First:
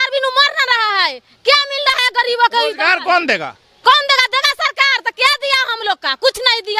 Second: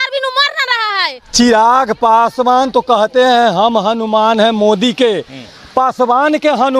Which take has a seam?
second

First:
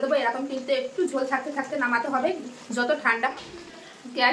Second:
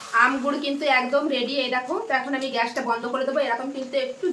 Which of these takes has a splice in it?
first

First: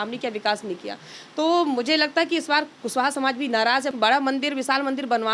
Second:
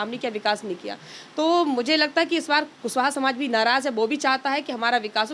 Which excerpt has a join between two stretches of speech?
first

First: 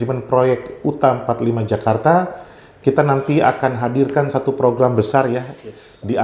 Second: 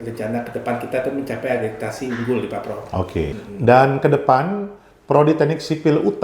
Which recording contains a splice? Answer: second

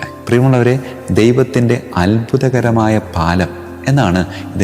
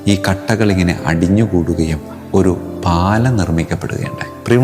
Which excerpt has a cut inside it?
second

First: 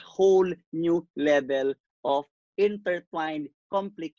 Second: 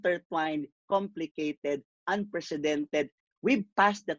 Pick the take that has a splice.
second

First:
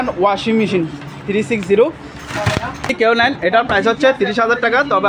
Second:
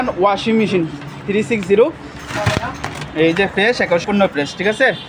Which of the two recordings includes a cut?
first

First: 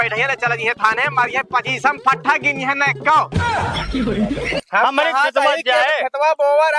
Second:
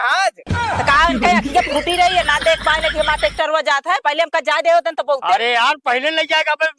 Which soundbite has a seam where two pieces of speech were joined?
first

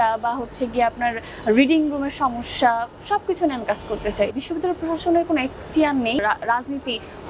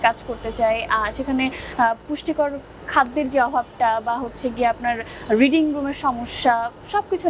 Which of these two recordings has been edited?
first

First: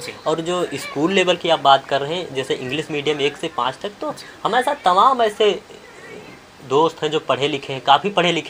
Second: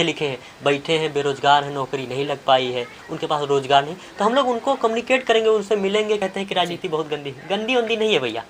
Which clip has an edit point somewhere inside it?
second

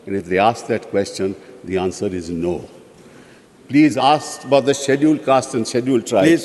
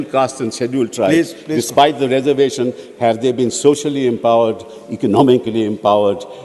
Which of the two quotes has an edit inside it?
first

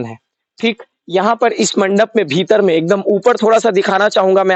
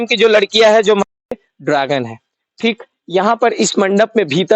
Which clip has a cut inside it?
second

